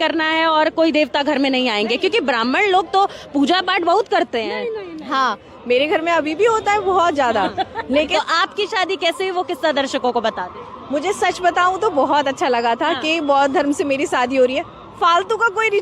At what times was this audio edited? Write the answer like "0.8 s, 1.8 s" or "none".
8.1 s